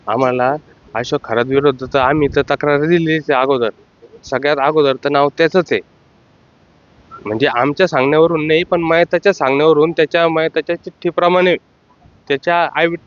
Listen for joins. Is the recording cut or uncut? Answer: uncut